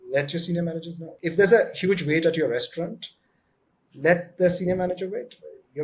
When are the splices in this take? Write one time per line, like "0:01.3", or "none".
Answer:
0:01.1